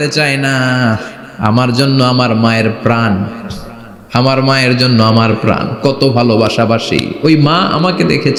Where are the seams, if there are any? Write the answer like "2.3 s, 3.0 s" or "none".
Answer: none